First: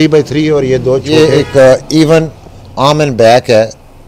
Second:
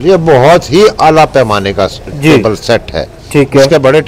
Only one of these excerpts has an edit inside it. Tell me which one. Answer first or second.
first